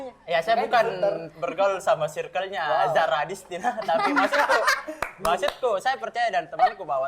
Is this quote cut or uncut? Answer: uncut